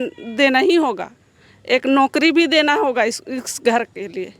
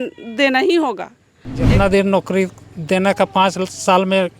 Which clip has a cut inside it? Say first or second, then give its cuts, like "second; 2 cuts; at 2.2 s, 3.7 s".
second; 1 cut; at 1.7 s